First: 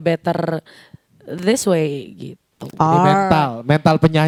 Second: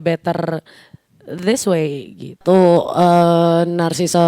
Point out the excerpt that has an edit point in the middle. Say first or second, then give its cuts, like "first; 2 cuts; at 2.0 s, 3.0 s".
second; 1 cut; at 2.4 s